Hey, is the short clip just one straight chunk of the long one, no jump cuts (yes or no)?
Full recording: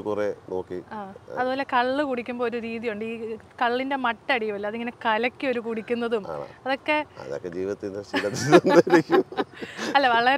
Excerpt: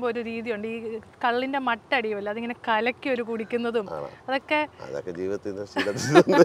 yes